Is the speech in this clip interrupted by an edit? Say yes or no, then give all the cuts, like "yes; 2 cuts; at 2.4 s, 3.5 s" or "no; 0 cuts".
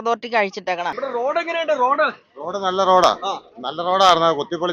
yes; 1 cut; at 0.9 s